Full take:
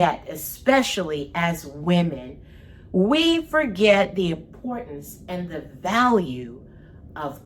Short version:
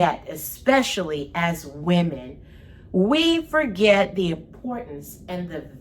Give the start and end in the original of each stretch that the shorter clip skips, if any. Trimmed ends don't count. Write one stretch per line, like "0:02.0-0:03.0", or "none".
none